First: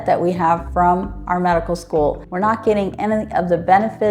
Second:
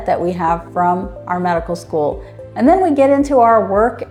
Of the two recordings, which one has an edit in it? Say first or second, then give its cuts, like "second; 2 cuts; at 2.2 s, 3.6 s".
first; 1 cut; at 2.3 s